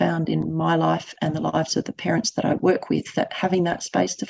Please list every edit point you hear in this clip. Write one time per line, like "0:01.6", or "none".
none